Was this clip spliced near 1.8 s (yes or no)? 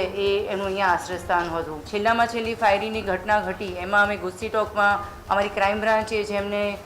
yes